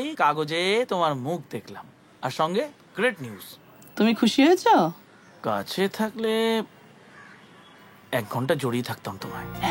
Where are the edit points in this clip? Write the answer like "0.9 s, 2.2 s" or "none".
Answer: none